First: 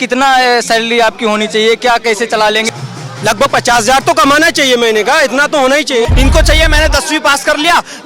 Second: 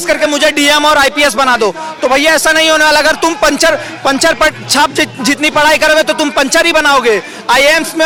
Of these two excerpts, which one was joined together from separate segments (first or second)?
first